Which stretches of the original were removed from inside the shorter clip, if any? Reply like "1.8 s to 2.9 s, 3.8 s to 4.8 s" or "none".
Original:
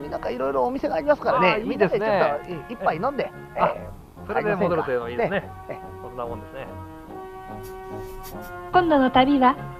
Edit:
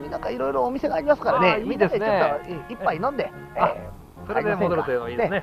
none

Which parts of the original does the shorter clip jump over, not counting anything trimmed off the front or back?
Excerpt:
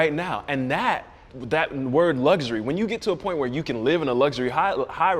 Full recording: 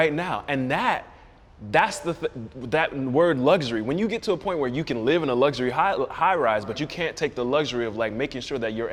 1.3 s to 2.5 s

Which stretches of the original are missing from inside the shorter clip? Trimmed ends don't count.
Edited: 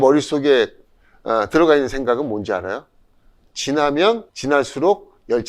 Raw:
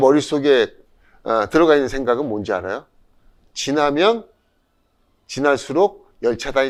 4.3 s to 5.2 s

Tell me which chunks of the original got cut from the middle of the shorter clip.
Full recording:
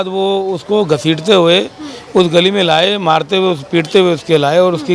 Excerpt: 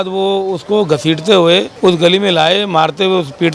1.7 s to 2.0 s

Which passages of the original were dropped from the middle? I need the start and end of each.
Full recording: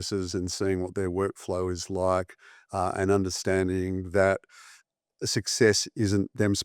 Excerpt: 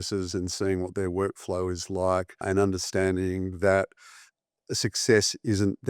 2.4 s to 2.9 s

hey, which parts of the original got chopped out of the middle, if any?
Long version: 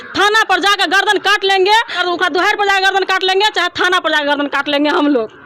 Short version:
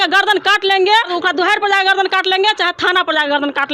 1.9 s to 2.1 s

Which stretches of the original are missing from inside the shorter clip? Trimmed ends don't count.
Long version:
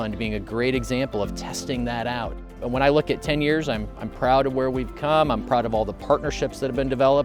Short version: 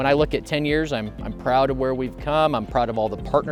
none

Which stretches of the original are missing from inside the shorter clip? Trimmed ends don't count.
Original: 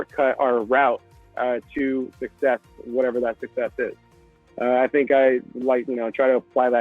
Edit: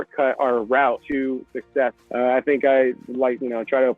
1.0 s to 1.7 s, 2.7 s to 4.5 s

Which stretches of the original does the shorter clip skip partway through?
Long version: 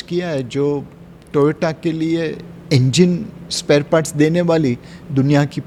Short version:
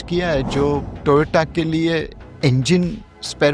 0.9 s to 1.2 s

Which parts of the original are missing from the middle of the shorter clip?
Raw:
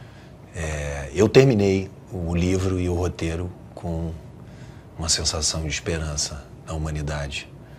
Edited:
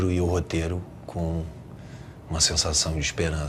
none

